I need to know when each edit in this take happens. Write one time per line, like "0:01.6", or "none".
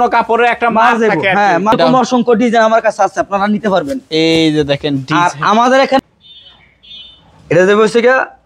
0:01.7
0:06.0